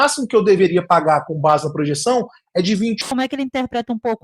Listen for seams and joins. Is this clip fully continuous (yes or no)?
no